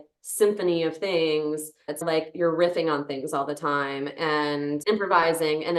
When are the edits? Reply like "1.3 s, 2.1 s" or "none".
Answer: 2.0 s, 4.8 s